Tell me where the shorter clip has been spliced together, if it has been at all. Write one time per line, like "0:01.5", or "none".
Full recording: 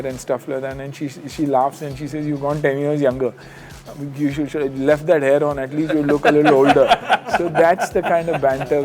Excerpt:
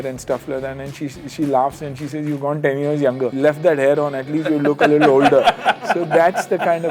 0:03.3